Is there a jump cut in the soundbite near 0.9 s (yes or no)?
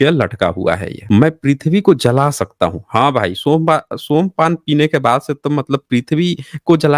yes